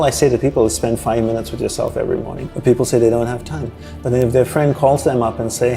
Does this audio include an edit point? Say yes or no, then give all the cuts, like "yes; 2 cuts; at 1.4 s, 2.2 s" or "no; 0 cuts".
yes; 1 cut; at 2.4 s